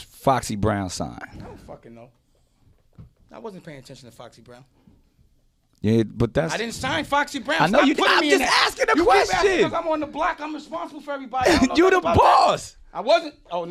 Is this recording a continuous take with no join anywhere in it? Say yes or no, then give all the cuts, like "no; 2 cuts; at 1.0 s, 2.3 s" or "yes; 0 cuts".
yes; 0 cuts